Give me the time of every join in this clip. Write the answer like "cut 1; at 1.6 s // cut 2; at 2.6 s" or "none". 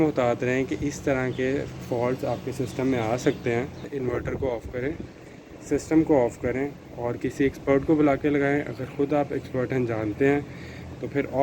cut 1; at 3.9 s